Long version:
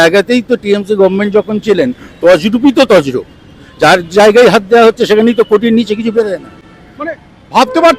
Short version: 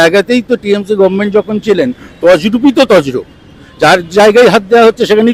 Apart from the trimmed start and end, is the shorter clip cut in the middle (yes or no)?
no